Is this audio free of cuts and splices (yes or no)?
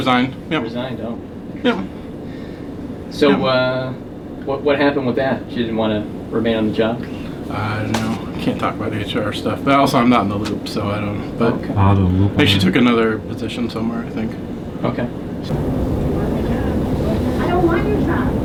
yes